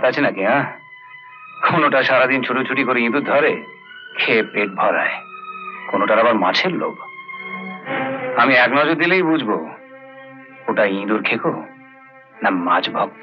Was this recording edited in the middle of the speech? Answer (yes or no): no